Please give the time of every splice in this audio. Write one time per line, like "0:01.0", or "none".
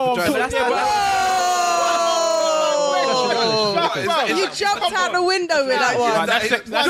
none